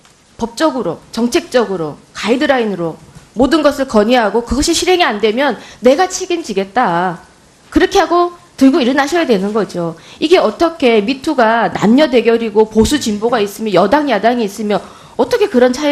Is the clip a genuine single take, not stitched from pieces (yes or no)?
no